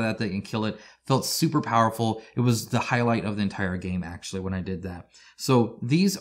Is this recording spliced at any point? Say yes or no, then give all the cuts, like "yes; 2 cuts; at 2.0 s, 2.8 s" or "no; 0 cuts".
no; 0 cuts